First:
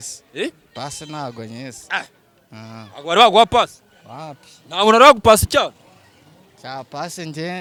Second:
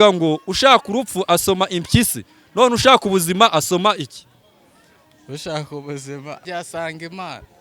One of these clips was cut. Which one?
second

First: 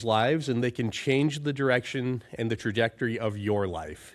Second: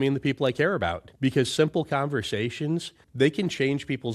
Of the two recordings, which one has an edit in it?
second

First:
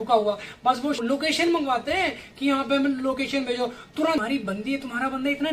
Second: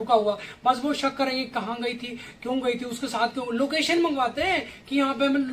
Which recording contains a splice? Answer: first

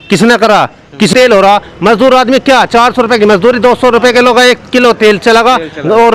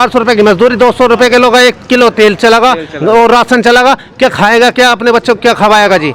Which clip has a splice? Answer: first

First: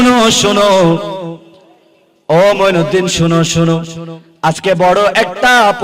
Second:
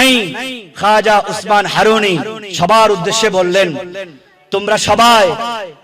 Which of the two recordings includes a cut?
second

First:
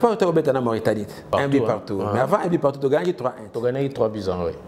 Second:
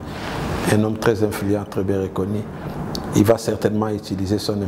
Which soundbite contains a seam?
first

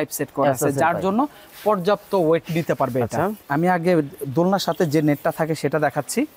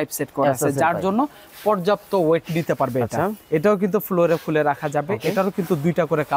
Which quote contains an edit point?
first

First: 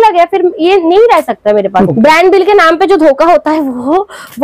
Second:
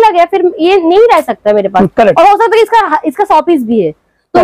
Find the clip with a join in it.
first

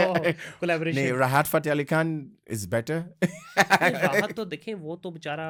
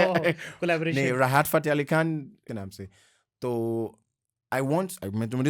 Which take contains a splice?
second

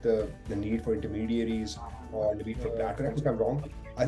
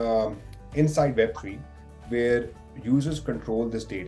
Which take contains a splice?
first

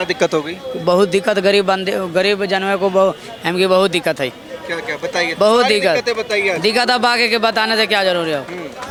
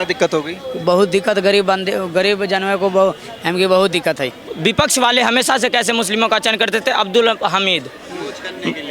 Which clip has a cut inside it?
second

